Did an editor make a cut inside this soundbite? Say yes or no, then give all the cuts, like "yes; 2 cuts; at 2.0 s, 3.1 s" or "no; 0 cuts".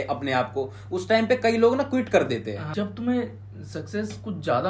yes; 1 cut; at 2.6 s